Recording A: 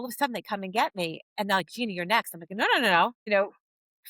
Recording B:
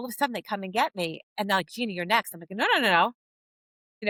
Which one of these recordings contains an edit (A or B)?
A